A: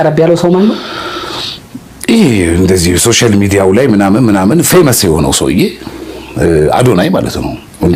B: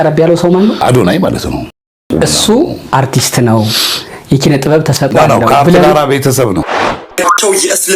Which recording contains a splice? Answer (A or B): B